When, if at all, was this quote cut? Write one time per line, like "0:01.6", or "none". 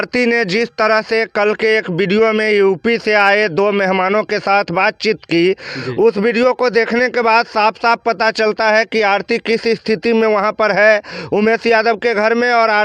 none